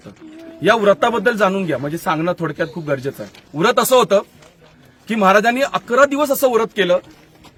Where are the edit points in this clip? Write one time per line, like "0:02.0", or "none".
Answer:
none